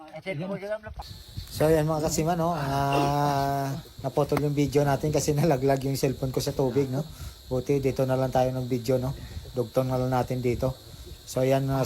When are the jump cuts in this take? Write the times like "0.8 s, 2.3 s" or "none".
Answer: 0.9 s